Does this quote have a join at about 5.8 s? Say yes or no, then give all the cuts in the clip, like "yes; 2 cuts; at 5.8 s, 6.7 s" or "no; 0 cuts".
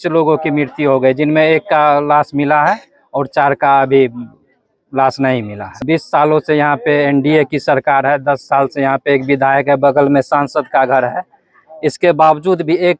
yes; 1 cut; at 5.8 s